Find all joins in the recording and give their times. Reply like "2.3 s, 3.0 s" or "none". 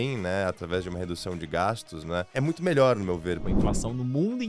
2.3 s, 3.5 s